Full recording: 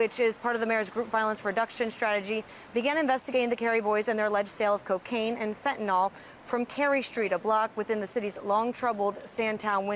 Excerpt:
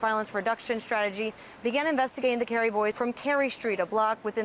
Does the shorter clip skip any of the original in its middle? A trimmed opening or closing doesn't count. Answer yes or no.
yes